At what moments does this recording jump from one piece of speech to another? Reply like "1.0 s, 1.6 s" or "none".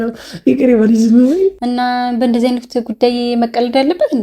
1.6 s